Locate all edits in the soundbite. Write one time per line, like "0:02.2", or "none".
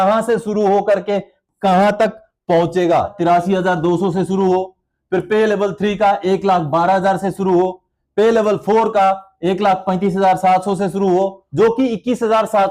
0:03.1
0:11.4